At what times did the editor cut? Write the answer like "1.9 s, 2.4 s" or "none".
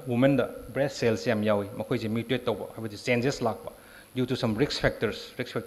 none